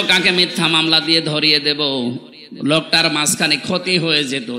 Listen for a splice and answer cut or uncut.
uncut